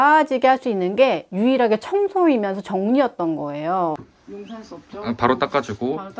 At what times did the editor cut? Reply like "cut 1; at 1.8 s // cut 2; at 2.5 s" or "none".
cut 1; at 4.0 s